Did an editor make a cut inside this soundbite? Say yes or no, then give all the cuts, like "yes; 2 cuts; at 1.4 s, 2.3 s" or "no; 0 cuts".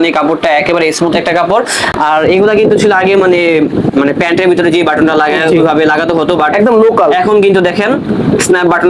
no; 0 cuts